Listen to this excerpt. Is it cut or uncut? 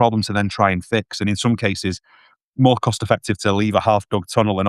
uncut